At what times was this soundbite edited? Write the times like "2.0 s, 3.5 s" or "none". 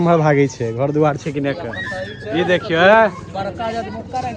none